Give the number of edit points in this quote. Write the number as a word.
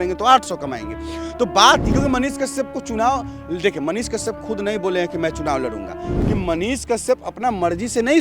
two